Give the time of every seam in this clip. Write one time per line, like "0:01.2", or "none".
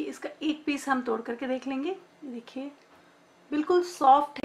none